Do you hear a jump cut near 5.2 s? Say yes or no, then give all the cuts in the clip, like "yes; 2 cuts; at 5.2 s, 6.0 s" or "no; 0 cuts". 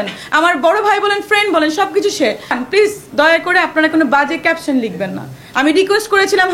no; 1 cut; at 2.6 s